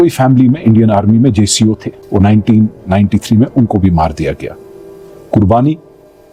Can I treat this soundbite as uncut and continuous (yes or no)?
yes